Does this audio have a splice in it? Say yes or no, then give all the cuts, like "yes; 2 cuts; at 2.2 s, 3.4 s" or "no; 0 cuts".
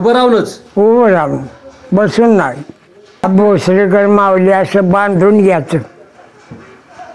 yes; 1 cut; at 3.2 s